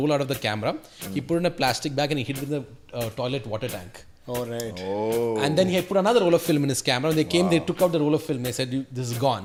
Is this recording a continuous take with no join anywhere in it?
yes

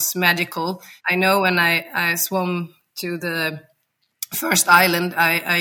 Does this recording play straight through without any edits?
no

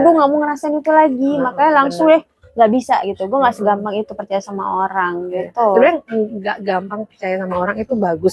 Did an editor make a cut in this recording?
no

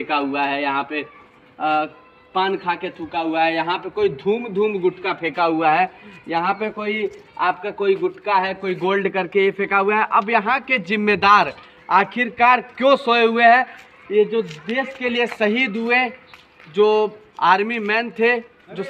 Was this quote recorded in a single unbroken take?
yes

